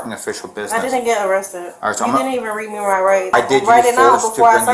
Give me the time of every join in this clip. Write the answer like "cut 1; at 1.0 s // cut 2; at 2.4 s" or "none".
cut 1; at 3.3 s